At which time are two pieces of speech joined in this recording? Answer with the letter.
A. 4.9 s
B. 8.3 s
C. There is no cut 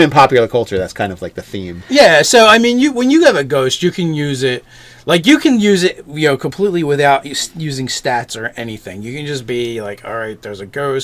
C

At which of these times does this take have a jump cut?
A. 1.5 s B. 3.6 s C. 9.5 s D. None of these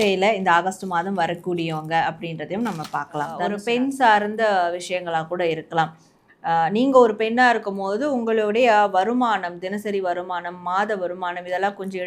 B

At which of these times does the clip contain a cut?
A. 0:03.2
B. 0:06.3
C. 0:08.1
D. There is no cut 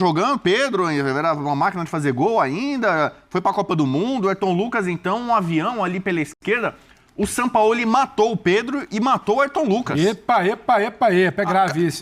B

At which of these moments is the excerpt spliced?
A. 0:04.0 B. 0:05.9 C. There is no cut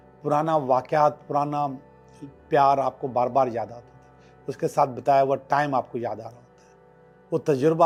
C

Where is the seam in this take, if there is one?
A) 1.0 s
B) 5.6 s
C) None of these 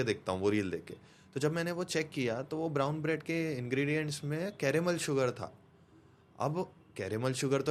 C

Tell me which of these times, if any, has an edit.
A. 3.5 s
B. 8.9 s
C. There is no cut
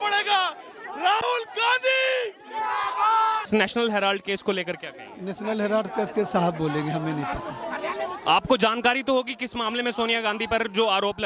A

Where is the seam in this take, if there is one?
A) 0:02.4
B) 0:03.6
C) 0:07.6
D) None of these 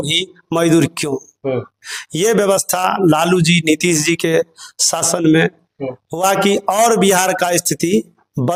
D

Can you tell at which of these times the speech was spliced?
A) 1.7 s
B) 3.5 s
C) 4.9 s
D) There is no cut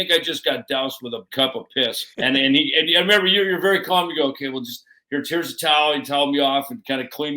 A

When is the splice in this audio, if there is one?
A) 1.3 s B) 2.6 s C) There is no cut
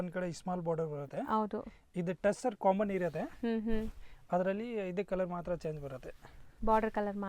C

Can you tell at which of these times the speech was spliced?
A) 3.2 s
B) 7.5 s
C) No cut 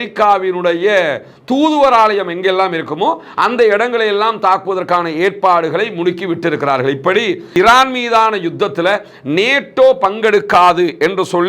B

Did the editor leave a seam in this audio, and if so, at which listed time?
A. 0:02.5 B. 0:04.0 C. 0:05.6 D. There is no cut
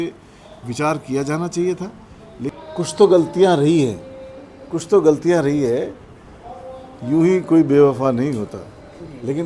A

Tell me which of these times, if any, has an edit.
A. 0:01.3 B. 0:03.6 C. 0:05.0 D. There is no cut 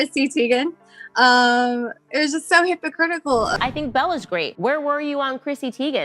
B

